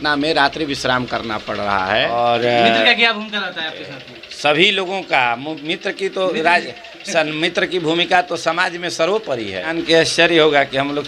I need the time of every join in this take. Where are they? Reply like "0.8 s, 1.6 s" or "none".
2.1 s, 9.8 s